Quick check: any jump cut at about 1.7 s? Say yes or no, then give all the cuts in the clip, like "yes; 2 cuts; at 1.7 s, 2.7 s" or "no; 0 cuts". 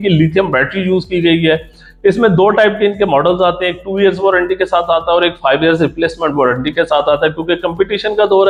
no; 0 cuts